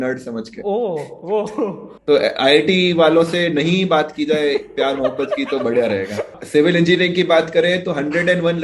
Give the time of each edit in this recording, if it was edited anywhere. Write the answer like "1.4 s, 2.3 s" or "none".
1.9 s, 6.2 s